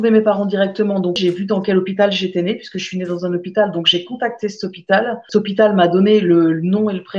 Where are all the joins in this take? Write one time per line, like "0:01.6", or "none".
0:01.2